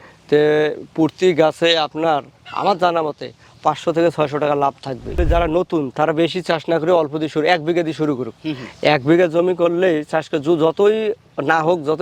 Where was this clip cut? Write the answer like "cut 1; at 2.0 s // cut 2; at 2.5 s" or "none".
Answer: cut 1; at 5.1 s